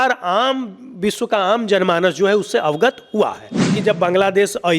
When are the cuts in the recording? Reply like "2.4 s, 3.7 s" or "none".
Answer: 3.8 s